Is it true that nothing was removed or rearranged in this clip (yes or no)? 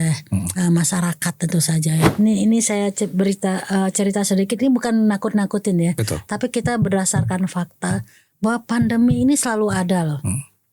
no